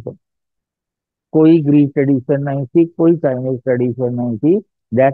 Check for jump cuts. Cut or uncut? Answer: uncut